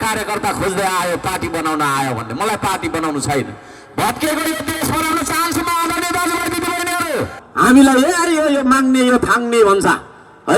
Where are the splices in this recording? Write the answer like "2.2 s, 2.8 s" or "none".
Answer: 7.4 s